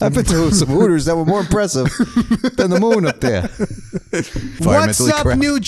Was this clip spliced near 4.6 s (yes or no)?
yes